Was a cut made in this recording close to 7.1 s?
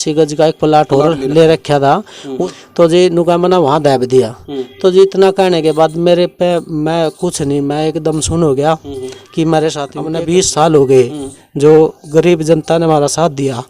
no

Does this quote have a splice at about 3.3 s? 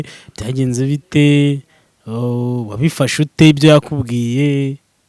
no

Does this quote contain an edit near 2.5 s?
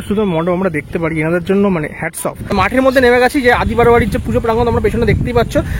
yes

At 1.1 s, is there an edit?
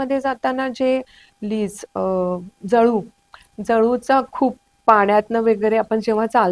no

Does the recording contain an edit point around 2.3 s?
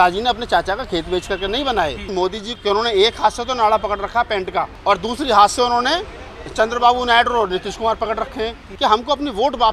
yes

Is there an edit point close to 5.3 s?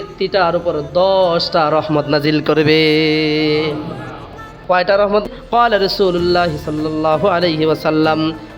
yes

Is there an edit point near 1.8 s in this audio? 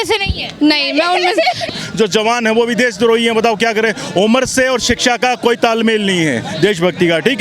yes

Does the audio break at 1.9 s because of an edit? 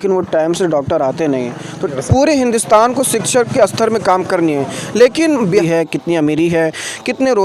yes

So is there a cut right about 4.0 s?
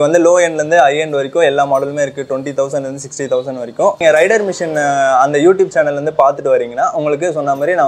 yes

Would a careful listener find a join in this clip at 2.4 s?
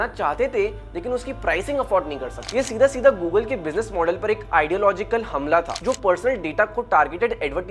yes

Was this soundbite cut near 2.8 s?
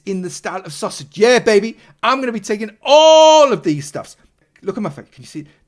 no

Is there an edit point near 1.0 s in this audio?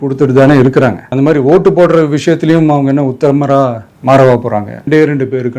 yes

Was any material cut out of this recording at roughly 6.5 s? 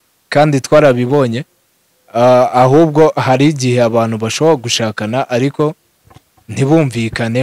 no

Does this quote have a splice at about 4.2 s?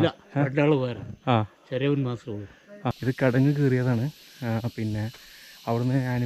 no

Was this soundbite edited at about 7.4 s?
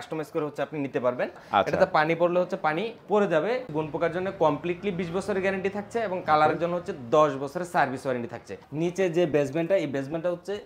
no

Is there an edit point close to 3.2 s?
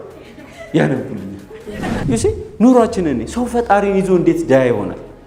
no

